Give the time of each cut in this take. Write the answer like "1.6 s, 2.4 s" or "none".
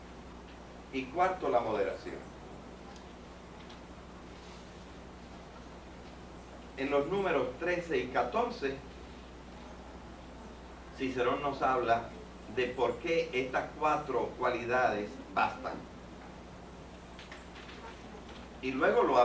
7.1 s